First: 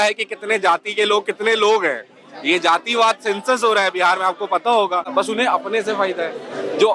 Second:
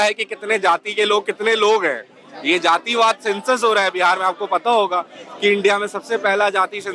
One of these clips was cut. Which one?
first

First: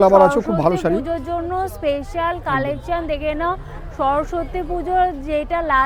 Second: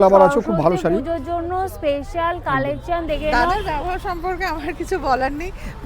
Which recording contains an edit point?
second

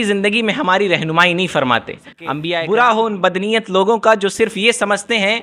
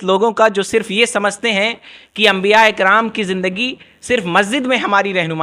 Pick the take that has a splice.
first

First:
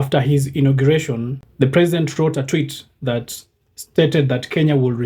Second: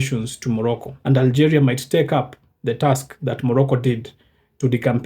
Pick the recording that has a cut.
second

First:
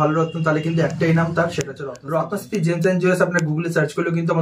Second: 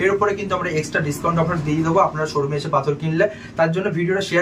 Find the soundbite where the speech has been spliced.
first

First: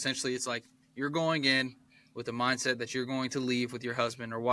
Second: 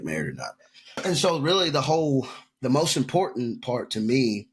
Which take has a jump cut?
second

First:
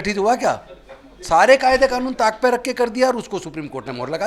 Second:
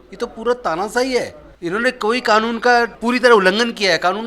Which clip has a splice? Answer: second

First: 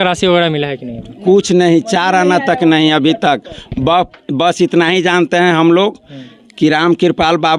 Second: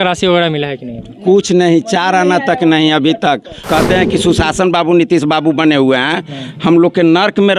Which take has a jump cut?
second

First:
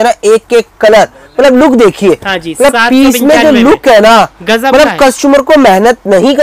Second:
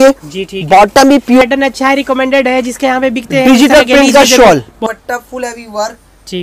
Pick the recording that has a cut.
second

